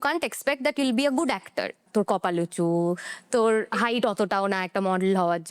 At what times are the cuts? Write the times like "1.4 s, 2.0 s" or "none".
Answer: 1.8 s, 3.7 s